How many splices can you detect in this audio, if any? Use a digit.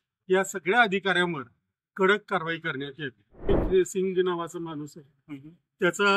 1